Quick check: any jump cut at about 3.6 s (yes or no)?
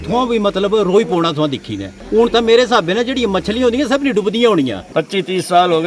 no